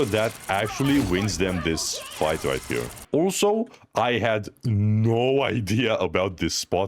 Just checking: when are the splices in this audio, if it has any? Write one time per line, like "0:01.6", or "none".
0:03.0